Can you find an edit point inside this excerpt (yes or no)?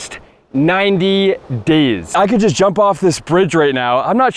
yes